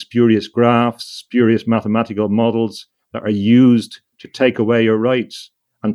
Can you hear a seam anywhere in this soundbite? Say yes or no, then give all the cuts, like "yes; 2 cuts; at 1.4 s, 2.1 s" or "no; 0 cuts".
no; 0 cuts